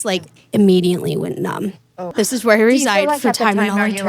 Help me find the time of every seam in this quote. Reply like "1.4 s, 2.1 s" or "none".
2.1 s